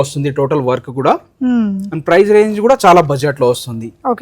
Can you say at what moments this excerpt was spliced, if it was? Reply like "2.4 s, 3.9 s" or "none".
none